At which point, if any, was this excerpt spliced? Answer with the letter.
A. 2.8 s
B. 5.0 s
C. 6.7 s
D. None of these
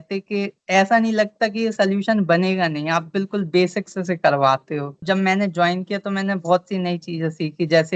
B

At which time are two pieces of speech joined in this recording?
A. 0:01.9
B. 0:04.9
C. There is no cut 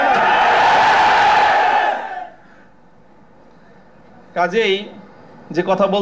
C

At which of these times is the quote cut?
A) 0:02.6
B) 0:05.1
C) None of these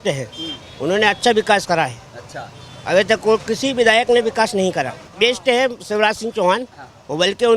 B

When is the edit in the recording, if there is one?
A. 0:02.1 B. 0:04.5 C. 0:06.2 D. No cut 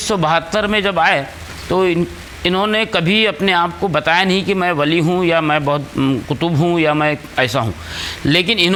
D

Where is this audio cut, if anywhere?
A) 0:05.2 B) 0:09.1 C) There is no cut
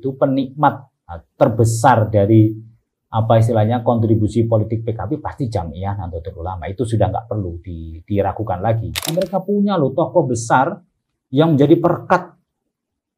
B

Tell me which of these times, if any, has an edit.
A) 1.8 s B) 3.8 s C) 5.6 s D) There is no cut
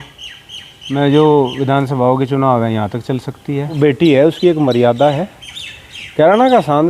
B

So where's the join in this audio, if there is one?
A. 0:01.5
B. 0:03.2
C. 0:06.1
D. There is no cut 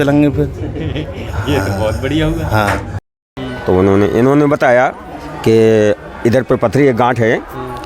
B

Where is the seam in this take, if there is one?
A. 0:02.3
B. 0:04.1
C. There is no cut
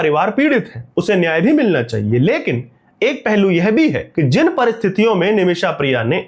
B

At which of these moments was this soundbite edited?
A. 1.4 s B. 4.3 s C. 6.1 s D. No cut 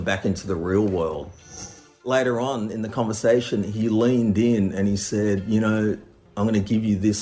A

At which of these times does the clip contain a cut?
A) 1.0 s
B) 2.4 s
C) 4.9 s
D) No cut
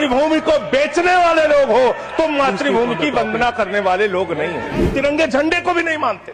C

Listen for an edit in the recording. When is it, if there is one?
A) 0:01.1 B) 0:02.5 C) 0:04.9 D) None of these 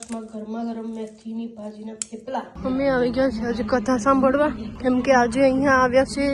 B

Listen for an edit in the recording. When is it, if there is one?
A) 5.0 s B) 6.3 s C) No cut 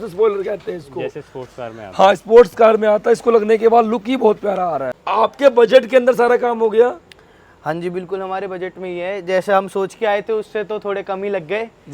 A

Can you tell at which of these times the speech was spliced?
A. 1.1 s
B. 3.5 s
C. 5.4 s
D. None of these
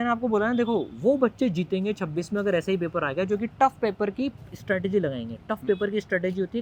D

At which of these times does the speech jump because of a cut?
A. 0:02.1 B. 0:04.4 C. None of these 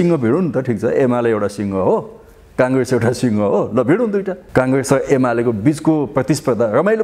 B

